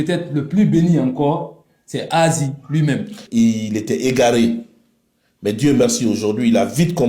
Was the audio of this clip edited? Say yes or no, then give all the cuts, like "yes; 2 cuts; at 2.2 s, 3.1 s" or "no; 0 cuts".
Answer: yes; 1 cut; at 3.2 s